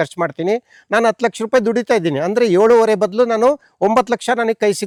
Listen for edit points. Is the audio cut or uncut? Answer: uncut